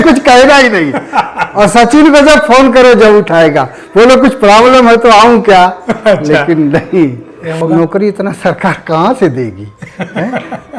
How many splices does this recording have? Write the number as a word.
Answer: one